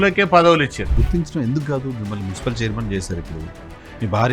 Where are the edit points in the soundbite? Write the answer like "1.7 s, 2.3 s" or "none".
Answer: 1.0 s